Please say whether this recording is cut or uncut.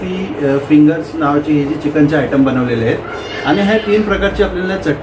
uncut